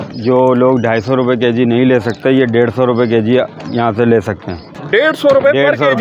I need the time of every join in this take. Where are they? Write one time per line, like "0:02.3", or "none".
0:04.7